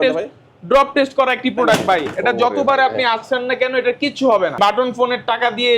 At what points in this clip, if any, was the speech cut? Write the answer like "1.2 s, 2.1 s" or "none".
4.6 s

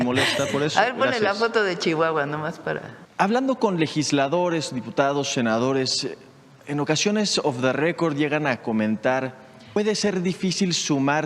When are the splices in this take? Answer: 3.0 s, 9.8 s

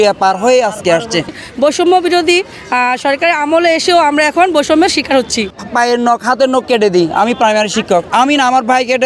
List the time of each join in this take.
1.3 s, 5.6 s

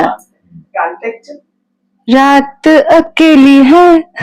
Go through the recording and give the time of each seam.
none

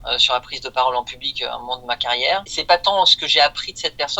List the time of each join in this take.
2.5 s

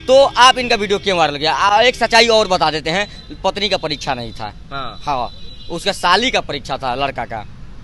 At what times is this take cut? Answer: none

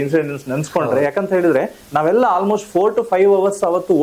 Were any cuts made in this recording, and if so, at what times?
none

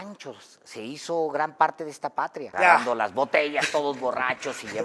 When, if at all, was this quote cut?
2.5 s

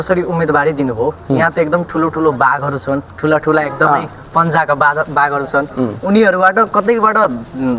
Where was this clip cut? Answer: none

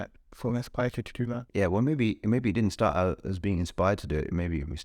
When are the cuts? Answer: 1.5 s

